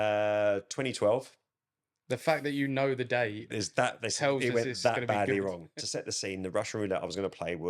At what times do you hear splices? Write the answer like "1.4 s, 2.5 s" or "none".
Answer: 5.7 s